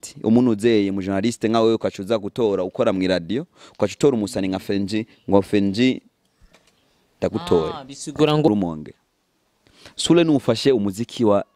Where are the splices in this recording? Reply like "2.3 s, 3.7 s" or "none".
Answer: 8.5 s